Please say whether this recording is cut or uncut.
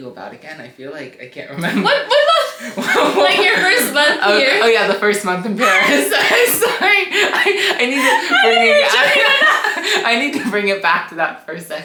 uncut